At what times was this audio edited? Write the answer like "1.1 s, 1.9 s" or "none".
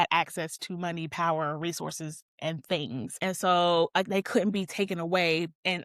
none